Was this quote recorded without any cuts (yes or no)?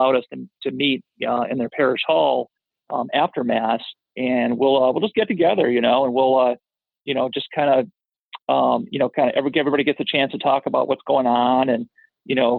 yes